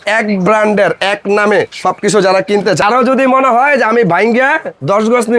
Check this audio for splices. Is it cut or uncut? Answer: cut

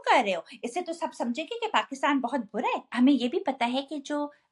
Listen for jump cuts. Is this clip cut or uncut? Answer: cut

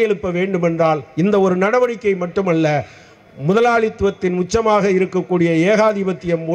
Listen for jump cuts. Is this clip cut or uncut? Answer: uncut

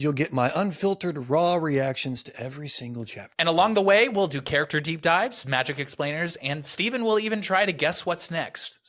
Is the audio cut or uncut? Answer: uncut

